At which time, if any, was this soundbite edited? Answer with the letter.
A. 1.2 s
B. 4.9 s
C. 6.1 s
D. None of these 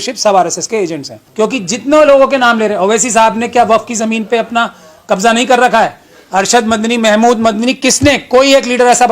A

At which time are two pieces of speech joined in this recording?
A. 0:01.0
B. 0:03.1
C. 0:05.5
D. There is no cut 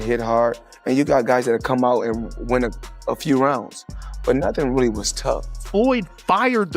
C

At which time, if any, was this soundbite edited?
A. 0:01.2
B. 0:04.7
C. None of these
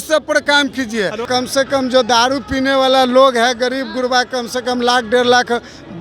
A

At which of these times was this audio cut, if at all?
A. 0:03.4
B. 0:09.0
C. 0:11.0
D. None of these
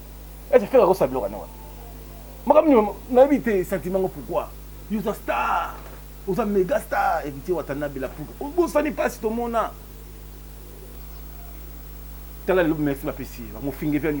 C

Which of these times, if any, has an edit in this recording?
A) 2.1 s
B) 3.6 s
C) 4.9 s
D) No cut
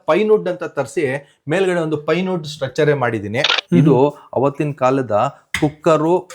B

